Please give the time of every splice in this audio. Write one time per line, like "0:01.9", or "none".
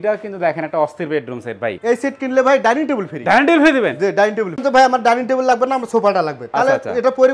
0:01.8
0:04.6